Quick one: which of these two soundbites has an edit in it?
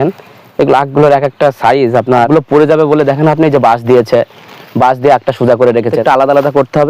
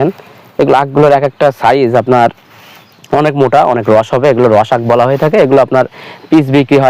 first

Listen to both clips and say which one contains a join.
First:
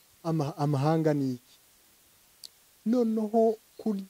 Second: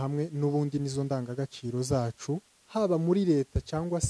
second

